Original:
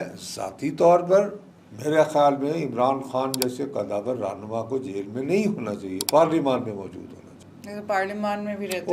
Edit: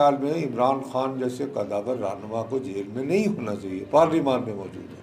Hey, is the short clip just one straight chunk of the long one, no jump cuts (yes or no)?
yes